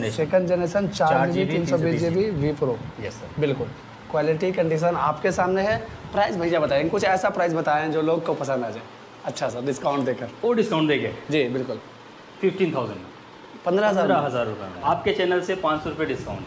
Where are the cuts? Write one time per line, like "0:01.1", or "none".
0:14.8